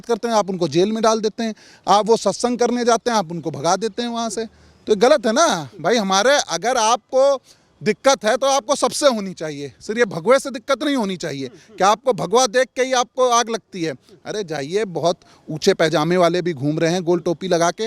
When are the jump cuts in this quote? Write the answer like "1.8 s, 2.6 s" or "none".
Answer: none